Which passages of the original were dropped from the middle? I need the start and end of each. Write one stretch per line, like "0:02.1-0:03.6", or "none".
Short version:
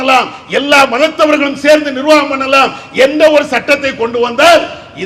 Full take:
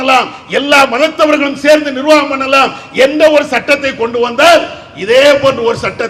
none